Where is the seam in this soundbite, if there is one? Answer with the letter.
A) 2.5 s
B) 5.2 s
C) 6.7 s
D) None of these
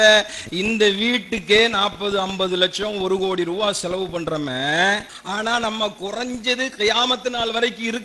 B